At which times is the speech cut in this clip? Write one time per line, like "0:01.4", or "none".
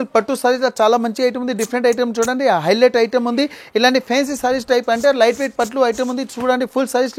none